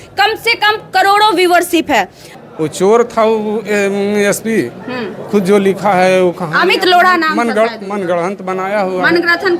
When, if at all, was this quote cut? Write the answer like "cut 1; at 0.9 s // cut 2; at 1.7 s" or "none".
cut 1; at 2.3 s

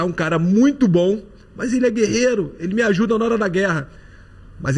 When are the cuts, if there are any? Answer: none

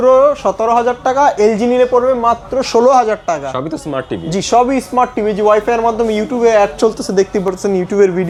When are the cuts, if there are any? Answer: none

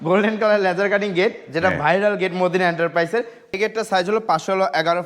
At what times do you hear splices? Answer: cut 1; at 3.5 s

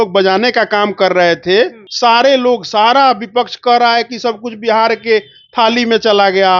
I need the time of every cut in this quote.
cut 1; at 1.8 s

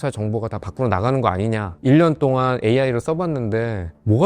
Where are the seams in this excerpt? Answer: cut 1; at 1.7 s

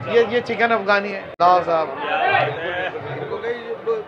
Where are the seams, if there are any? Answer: cut 1; at 1.2 s

